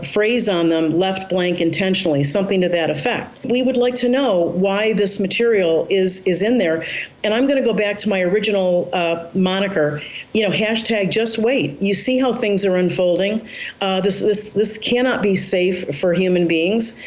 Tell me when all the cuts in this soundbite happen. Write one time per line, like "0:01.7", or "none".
0:03.5